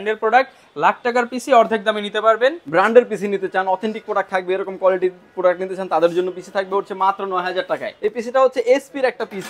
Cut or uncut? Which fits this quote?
cut